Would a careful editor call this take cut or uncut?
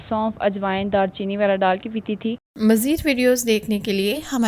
cut